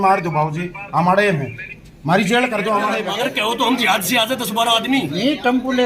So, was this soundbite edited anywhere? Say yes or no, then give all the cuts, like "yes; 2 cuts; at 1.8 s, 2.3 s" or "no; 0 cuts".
yes; 1 cut; at 3.1 s